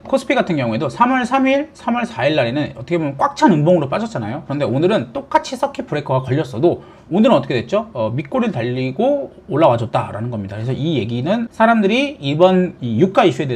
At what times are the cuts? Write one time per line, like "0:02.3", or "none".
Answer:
none

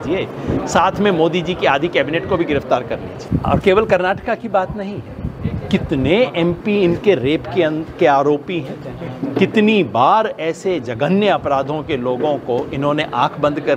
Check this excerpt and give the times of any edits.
0:03.2

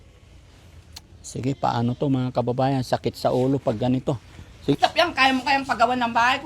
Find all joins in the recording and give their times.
0:04.7

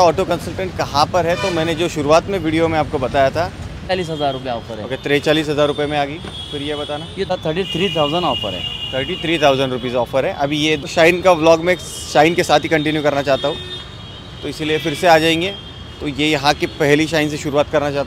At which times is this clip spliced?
0:03.9
0:07.3
0:10.8

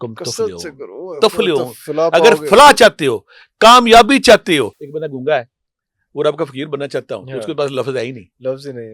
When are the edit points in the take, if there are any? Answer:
0:04.8

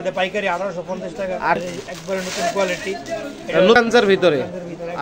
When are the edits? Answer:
0:01.6
0:03.8

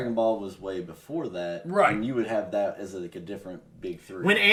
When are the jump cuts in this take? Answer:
none

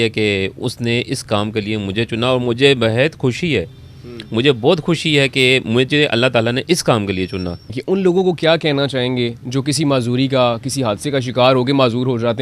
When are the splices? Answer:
0:07.8

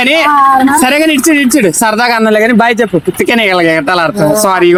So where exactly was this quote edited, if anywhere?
none

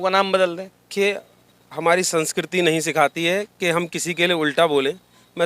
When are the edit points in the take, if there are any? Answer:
0:00.9

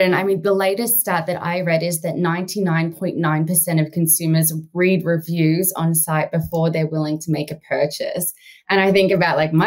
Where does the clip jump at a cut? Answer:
none

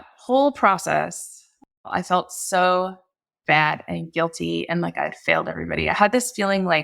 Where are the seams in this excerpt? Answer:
0:01.9

